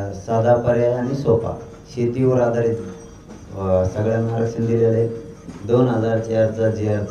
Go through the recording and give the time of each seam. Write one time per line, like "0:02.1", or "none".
none